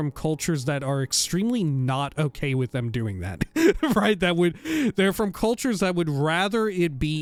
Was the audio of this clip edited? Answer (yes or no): no